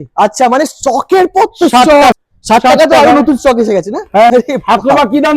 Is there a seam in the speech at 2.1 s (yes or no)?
yes